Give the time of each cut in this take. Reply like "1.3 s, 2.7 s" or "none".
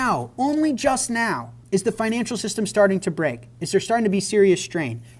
1.5 s